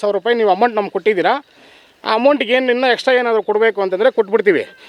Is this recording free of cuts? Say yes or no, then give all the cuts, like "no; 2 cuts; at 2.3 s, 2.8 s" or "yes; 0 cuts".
yes; 0 cuts